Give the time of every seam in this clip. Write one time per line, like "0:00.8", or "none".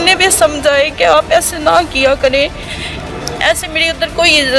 none

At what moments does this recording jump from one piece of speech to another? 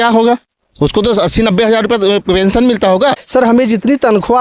0:03.2

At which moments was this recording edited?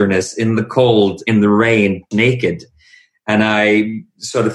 0:02.1

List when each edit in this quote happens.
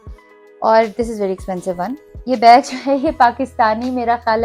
0:02.1

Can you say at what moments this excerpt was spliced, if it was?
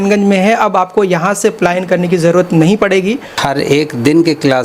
0:03.4

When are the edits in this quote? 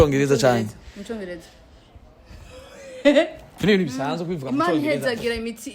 0:03.6

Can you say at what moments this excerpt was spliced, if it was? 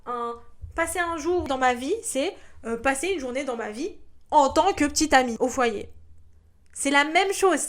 0:01.4
0:05.4

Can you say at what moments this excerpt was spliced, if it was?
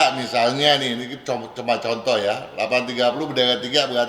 none

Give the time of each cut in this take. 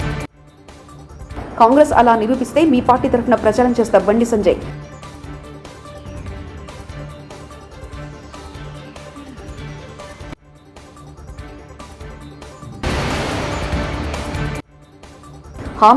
none

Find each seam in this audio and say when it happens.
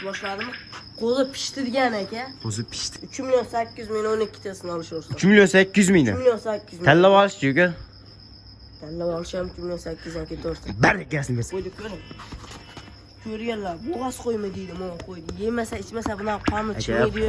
0:02.9
0:11.5

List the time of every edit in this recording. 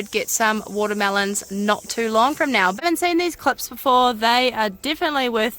0:02.8

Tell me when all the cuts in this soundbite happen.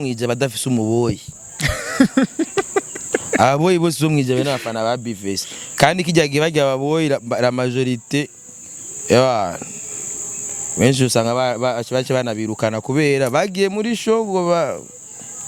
none

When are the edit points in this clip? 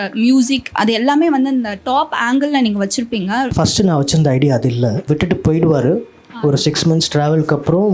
0:03.5
0:05.0

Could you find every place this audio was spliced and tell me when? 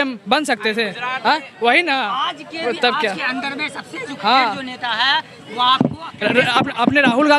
none

